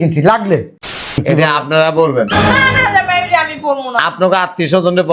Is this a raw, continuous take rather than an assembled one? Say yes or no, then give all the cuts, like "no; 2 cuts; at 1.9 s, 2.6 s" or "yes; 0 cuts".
no; 1 cut; at 1.1 s